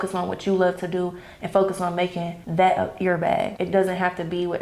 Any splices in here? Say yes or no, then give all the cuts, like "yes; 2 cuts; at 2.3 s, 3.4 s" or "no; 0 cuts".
yes; 2 cuts; at 2.4 s, 3.6 s